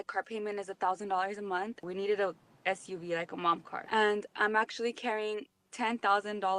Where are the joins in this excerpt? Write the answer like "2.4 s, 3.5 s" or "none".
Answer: 1.8 s, 3.7 s